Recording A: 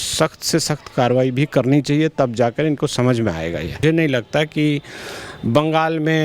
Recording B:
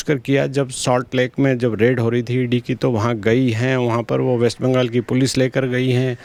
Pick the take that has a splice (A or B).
A